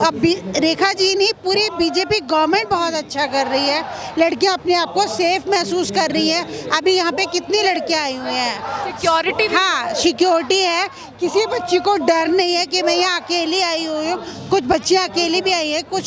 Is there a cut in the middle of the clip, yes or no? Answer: no